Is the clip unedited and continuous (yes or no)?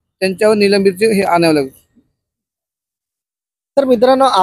yes